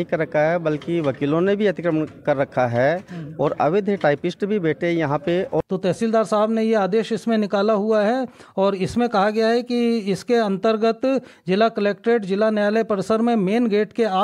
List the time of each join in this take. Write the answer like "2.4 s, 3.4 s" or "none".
5.6 s